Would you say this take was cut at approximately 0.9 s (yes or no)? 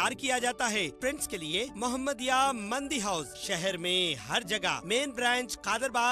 yes